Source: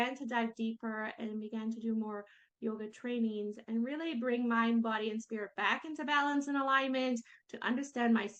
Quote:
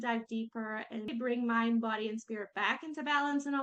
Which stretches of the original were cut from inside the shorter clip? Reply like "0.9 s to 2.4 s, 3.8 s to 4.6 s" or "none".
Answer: 1.4 s to 4.1 s